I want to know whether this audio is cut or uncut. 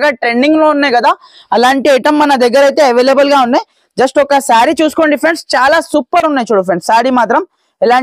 uncut